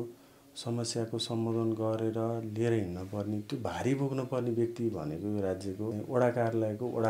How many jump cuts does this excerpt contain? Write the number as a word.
one